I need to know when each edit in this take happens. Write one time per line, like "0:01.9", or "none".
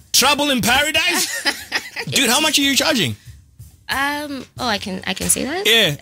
0:02.0